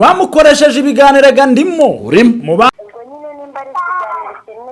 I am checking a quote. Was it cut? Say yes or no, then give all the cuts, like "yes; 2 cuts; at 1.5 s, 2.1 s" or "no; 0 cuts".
yes; 1 cut; at 2.7 s